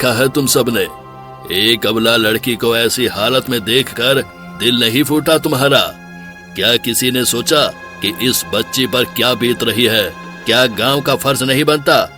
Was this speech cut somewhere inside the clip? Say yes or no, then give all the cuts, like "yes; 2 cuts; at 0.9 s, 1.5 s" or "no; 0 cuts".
no; 0 cuts